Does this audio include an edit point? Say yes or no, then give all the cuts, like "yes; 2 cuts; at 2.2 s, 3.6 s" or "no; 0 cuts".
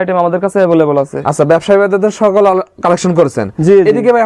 no; 0 cuts